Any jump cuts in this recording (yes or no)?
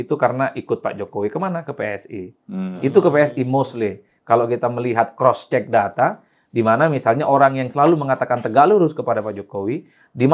no